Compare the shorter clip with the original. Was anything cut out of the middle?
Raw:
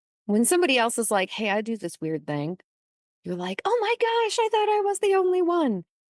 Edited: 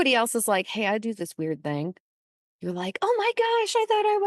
no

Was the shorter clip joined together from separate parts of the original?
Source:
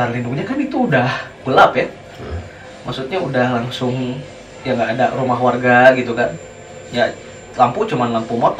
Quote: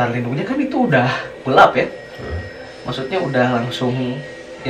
no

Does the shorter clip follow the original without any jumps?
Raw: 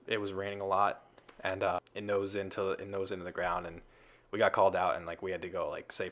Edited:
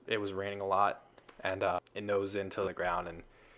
no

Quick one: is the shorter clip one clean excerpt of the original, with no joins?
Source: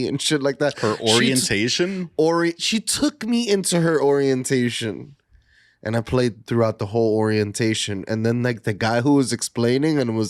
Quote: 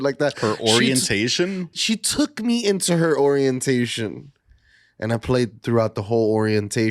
no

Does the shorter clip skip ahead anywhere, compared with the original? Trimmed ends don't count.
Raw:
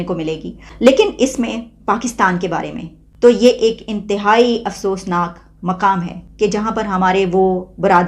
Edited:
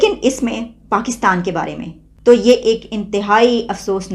no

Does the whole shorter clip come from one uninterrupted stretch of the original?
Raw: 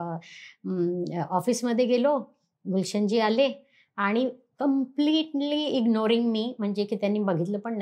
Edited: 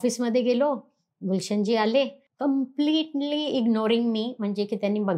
no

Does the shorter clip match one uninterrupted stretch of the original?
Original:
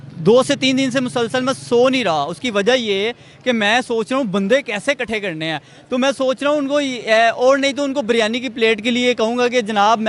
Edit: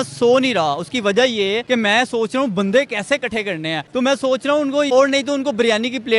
no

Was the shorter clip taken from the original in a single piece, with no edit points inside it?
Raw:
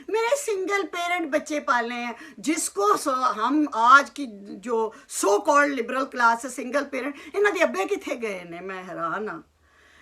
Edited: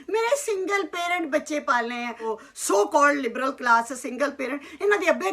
no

